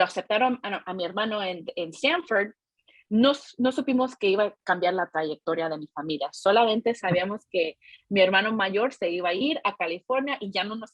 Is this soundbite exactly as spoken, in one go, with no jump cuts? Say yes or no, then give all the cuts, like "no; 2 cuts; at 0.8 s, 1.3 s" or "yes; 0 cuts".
yes; 0 cuts